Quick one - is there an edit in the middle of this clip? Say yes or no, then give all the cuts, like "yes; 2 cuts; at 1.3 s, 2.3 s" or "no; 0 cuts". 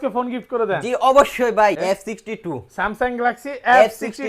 yes; 1 cut; at 1.8 s